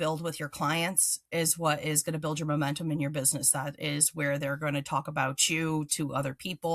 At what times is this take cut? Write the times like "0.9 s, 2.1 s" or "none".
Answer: none